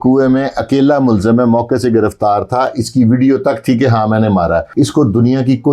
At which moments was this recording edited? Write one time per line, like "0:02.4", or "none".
0:04.7